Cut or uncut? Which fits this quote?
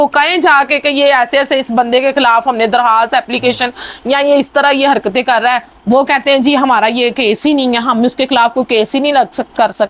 uncut